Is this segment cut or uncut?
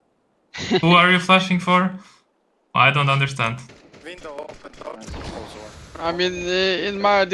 uncut